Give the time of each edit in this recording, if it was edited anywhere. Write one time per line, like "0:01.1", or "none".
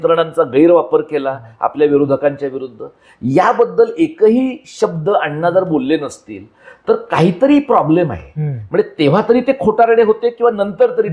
none